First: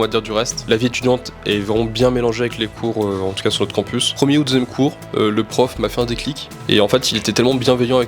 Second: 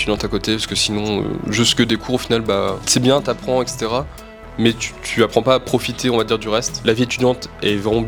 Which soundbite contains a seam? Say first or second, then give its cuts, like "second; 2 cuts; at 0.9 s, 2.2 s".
first; 1 cut; at 4.1 s